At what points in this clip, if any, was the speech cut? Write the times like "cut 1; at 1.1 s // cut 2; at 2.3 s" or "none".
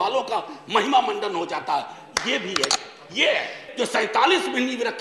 cut 1; at 3.6 s